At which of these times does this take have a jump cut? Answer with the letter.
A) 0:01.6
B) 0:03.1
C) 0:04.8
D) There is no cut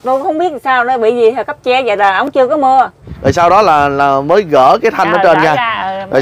B